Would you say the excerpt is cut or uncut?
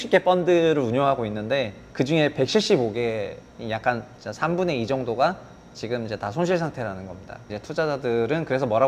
cut